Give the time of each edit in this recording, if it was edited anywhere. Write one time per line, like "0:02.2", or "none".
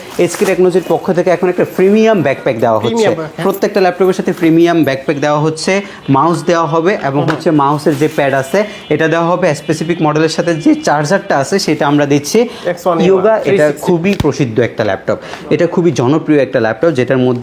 0:12.6